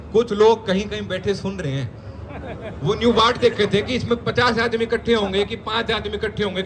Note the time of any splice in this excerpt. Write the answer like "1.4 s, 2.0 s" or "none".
none